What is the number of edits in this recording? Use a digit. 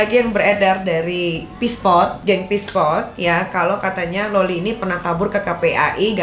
0